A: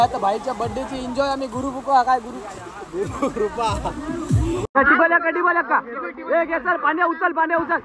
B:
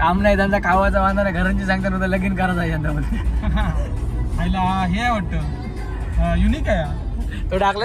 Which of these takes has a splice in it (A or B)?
A